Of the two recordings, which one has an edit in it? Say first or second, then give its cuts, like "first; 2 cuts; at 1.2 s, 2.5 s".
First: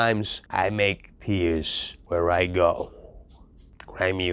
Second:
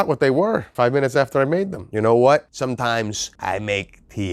second; 1 cut; at 1.8 s